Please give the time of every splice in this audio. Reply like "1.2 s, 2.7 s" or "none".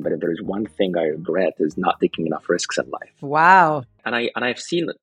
4.0 s